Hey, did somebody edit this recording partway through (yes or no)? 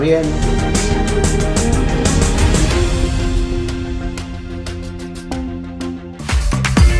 yes